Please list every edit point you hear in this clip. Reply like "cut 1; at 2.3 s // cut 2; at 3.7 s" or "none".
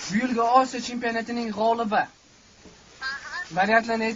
none